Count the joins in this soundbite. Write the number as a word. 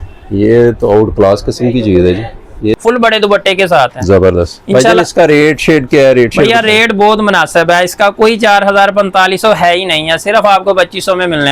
one